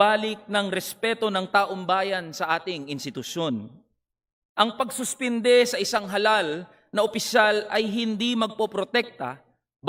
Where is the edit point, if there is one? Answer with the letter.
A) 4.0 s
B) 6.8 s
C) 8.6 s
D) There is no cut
D